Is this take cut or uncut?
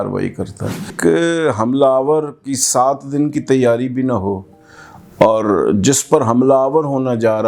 cut